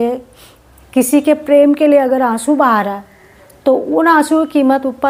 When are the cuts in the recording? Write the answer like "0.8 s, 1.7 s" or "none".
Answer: none